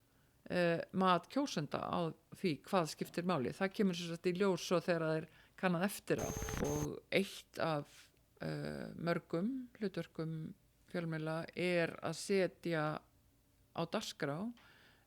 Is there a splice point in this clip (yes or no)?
yes